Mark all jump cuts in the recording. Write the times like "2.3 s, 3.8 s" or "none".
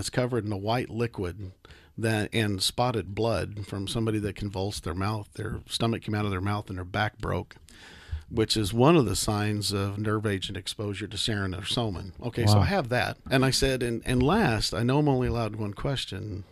13.2 s